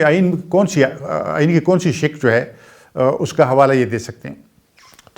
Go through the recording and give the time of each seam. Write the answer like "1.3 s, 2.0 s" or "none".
none